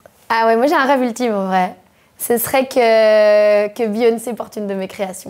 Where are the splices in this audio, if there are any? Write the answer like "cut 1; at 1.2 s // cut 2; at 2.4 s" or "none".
none